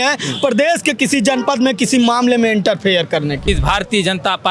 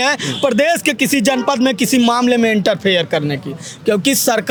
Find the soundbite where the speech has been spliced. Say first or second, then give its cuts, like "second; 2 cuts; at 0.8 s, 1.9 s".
first; 1 cut; at 3.4 s